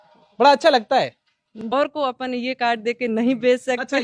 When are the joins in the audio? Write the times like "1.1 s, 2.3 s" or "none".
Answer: 1.7 s